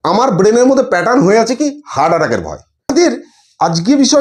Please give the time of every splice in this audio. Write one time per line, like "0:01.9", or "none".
0:02.9